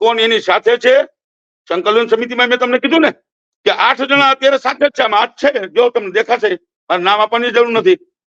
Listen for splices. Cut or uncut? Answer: uncut